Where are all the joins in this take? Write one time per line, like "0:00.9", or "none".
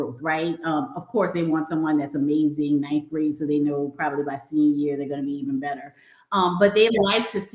none